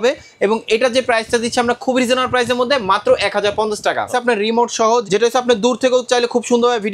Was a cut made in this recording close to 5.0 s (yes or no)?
yes